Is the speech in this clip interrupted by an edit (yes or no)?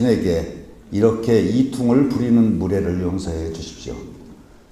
yes